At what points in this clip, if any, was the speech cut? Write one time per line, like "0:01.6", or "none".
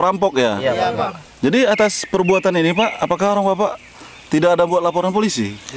0:01.2